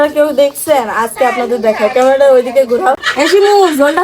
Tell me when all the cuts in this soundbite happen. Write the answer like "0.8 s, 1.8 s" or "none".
3.1 s